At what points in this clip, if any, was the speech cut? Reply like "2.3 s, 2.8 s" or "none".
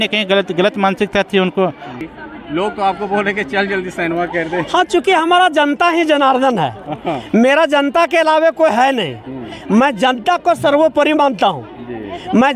1.9 s